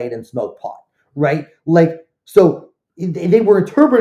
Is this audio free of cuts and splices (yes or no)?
yes